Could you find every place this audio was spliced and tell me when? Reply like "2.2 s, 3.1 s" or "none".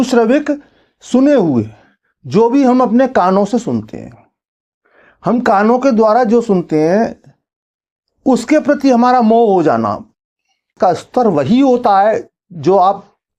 10.7 s